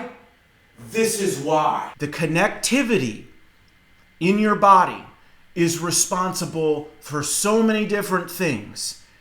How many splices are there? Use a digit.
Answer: 1